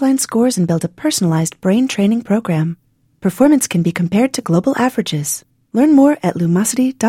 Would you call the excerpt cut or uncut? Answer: uncut